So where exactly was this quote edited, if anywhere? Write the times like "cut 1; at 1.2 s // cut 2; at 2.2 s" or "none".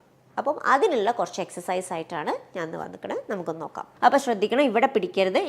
cut 1; at 3.9 s